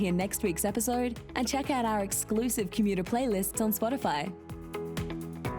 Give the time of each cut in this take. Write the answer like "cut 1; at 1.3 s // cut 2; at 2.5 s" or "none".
cut 1; at 4.5 s